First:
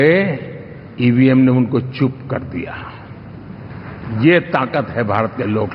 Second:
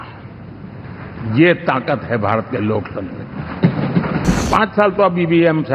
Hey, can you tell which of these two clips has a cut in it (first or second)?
second